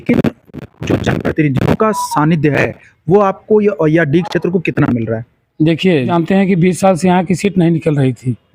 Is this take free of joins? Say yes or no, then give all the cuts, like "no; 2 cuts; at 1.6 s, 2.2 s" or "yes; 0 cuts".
no; 1 cut; at 6.1 s